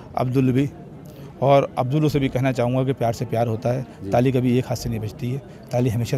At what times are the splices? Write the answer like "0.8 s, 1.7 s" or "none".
none